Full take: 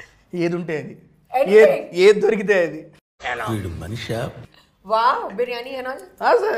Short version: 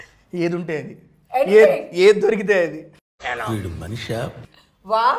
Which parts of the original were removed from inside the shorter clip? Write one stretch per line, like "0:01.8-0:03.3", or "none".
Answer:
none